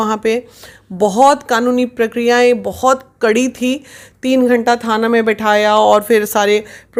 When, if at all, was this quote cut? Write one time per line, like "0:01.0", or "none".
none